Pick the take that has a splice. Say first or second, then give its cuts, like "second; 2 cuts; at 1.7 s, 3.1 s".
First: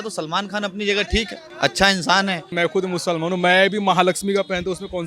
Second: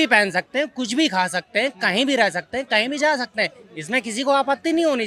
first; 2 cuts; at 1.4 s, 2.5 s